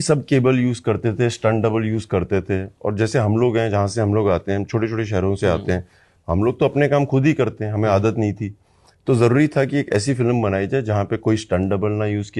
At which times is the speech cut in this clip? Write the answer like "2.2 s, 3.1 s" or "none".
none